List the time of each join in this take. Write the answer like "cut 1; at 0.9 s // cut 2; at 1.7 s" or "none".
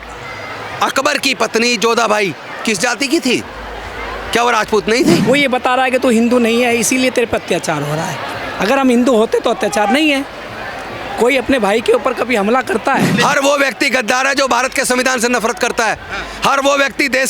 cut 1; at 5.2 s // cut 2; at 13.1 s